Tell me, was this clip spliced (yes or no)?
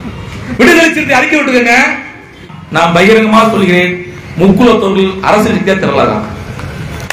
yes